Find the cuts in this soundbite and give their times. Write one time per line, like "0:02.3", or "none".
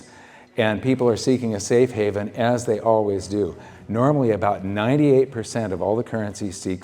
none

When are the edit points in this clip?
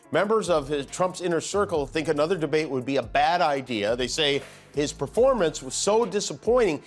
none

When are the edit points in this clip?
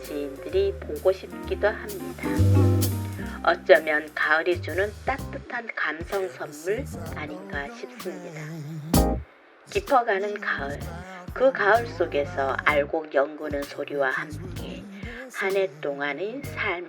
0:08.4
0:09.5

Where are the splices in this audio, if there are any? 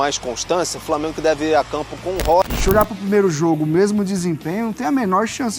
0:02.4

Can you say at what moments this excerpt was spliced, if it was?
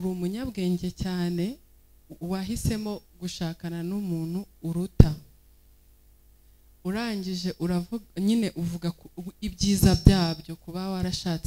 none

